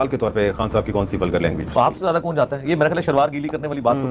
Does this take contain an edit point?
no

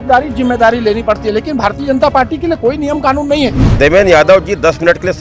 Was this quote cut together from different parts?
yes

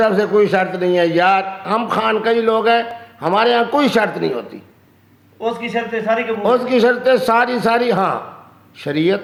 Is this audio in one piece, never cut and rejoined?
yes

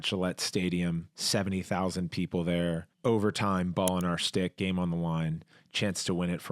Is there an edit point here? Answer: yes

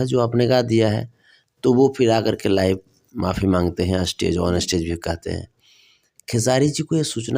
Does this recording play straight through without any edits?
yes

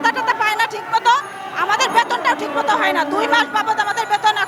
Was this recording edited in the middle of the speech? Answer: no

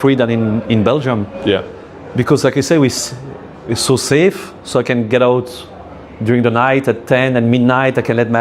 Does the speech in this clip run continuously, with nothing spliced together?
yes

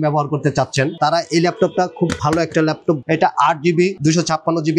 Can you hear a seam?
yes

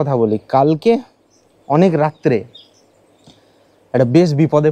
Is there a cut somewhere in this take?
no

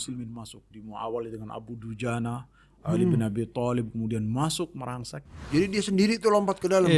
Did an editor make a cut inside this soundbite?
yes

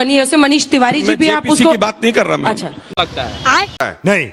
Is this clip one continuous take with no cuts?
yes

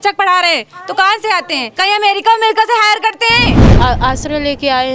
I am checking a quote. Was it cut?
yes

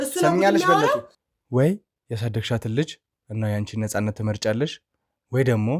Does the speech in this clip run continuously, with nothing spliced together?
no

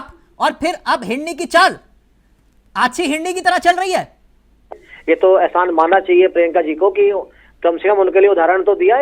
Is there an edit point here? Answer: yes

